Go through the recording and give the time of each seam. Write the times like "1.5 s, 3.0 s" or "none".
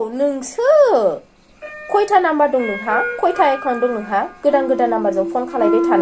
none